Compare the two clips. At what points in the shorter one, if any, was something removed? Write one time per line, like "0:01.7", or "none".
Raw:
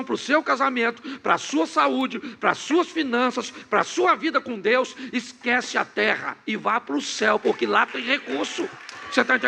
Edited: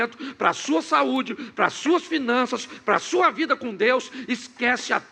none